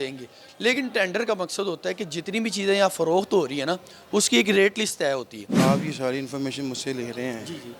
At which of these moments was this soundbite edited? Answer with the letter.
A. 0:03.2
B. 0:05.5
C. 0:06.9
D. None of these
B